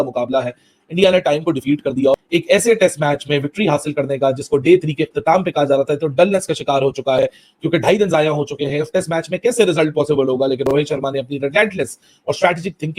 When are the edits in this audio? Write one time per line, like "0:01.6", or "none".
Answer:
none